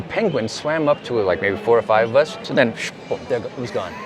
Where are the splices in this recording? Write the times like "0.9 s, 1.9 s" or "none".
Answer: 2.5 s

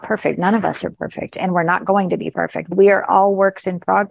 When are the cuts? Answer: 2.7 s

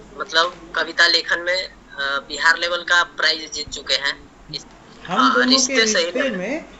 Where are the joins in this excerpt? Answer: 4.4 s

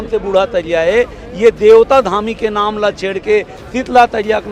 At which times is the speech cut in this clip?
none

